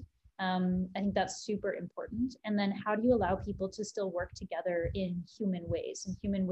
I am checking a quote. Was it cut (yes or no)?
no